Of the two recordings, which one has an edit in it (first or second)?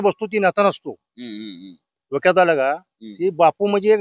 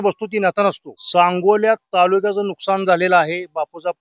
second